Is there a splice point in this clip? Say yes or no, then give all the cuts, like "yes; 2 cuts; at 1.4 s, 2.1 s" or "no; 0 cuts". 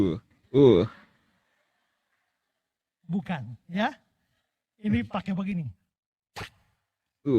no; 0 cuts